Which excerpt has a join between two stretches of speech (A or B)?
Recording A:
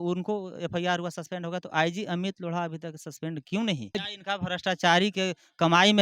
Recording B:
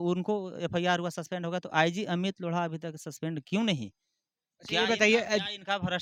A